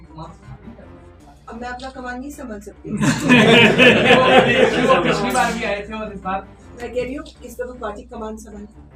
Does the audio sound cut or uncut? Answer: uncut